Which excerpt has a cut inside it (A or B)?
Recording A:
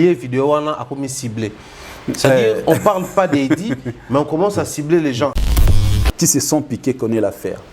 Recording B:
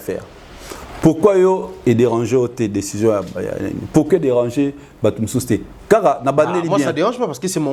A